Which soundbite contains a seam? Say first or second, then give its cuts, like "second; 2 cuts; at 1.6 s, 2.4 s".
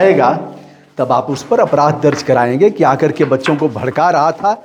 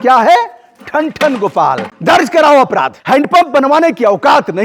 second; 2 cuts; at 1.9 s, 3.0 s